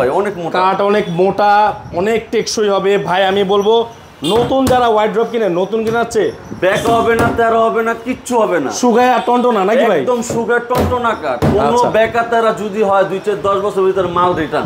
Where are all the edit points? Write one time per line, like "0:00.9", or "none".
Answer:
none